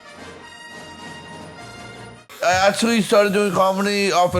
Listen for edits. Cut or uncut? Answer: cut